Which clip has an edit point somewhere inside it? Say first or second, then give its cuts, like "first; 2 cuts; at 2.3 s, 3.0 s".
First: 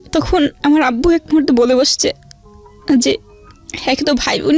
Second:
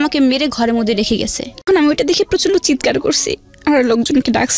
second; 1 cut; at 1.6 s